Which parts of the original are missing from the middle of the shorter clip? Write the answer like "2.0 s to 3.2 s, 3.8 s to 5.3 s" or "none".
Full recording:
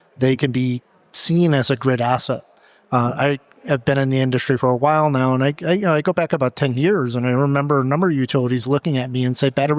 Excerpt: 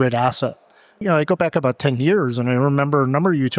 2.9 s to 5.8 s